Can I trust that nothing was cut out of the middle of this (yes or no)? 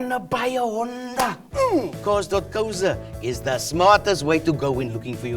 no